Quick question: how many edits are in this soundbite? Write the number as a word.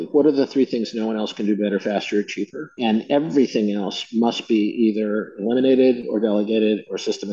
zero